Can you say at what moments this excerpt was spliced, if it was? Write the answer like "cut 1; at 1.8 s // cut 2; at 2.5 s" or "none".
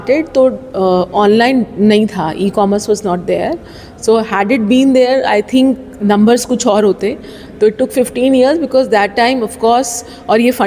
none